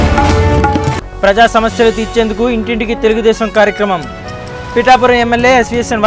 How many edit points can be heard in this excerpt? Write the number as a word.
one